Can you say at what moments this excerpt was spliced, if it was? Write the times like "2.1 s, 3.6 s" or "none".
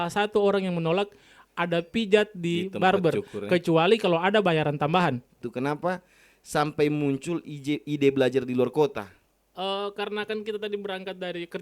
5.5 s